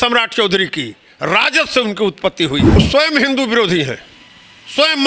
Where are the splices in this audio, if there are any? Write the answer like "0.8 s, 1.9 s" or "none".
2.8 s